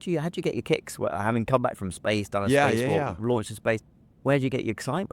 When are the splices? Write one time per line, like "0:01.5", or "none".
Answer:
none